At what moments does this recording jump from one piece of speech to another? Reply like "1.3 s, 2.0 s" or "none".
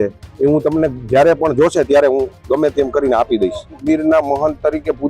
3.8 s